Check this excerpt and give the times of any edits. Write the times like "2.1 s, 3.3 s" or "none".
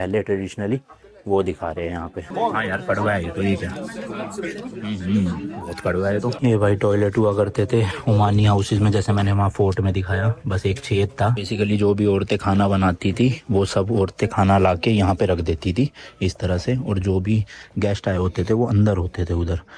2.2 s, 6.4 s, 11.4 s